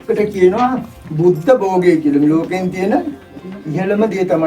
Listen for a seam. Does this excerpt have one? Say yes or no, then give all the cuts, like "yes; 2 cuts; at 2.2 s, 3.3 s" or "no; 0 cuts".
no; 0 cuts